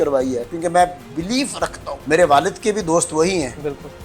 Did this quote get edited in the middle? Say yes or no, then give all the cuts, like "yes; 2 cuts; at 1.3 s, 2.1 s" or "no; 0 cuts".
yes; 1 cut; at 1.9 s